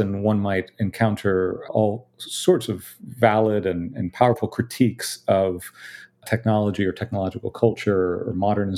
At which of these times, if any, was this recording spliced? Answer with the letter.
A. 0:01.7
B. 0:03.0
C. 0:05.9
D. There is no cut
A